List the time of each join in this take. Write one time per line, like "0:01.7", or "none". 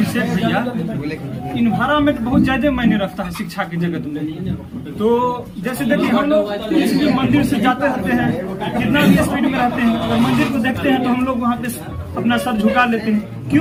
none